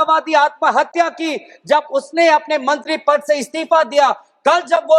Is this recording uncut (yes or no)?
yes